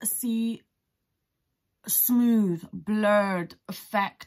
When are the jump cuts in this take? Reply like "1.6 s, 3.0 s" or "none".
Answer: none